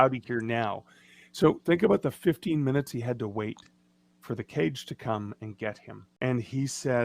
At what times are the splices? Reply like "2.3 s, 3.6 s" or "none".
6.1 s

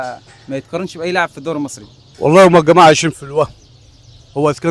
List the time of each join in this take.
2.0 s

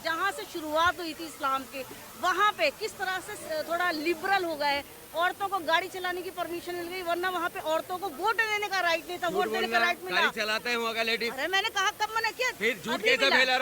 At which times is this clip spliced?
none

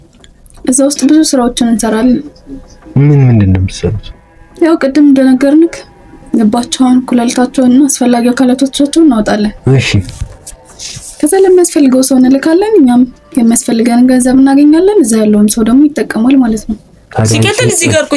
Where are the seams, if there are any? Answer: 17.0 s

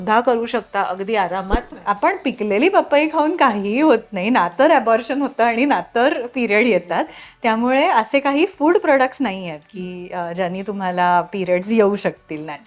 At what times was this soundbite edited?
1.7 s

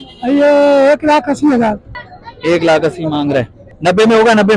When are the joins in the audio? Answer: 1.8 s, 3.6 s

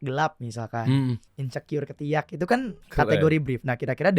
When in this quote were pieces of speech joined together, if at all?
1.3 s, 2.8 s

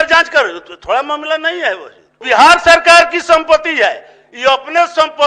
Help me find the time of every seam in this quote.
2.2 s

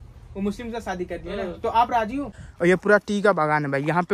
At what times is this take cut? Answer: 2.4 s

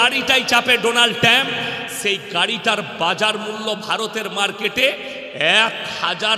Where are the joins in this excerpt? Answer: none

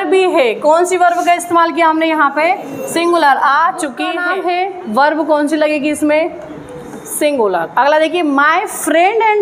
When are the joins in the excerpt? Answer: 4.2 s

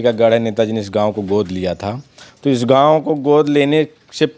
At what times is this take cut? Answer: none

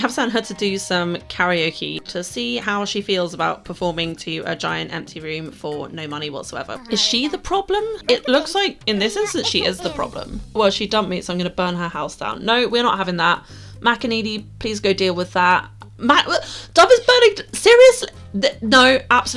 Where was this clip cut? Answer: 6.7 s, 10.6 s

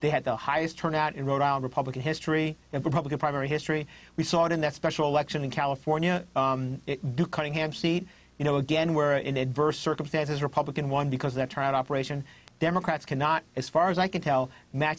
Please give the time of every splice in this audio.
none

